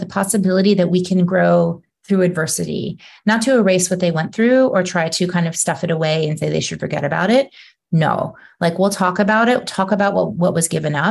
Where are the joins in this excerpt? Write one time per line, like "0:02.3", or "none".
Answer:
none

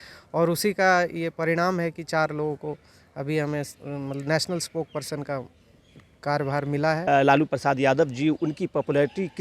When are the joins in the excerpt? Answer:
0:07.0

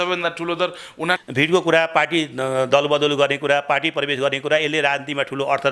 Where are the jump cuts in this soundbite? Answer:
0:01.2

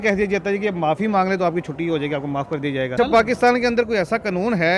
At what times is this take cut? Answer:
0:02.9

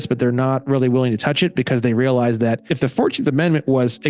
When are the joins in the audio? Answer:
0:02.7

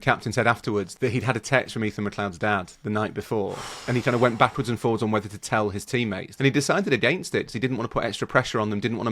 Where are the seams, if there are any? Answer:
0:00.9
0:06.3

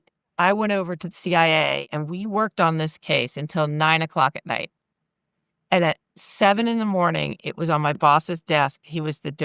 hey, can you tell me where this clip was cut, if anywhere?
0:01.9

